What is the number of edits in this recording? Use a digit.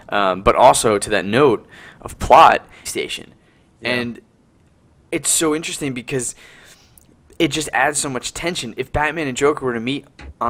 0